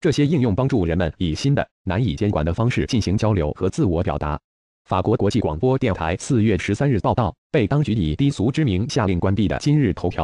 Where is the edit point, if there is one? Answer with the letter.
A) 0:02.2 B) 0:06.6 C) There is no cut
B